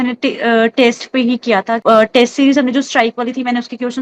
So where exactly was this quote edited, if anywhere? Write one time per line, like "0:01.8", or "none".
0:01.8